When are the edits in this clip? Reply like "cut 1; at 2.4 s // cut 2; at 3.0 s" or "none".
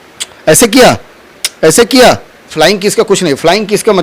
cut 1; at 2.5 s